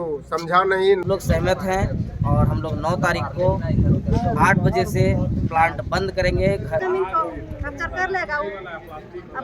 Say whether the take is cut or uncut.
cut